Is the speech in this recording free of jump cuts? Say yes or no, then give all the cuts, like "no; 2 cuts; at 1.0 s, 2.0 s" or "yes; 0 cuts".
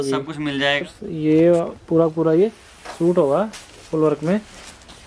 no; 1 cut; at 1.0 s